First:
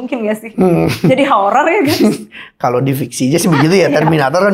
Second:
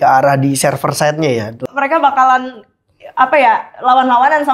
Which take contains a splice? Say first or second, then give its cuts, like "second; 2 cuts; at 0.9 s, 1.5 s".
second; 1 cut; at 1.7 s